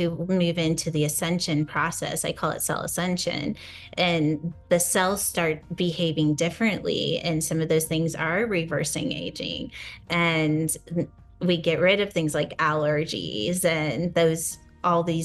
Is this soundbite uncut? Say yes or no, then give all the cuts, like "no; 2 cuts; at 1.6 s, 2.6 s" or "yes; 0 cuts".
yes; 0 cuts